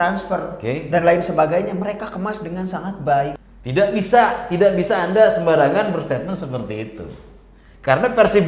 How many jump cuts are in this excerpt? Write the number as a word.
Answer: one